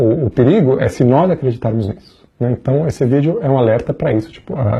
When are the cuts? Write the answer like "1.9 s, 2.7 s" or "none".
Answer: none